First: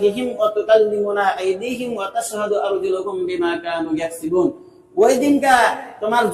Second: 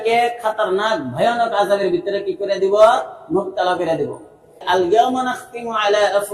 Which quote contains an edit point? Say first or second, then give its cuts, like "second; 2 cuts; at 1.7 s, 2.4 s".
second; 1 cut; at 4.6 s